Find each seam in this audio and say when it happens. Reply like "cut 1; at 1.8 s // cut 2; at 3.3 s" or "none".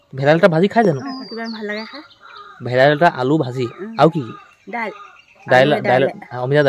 none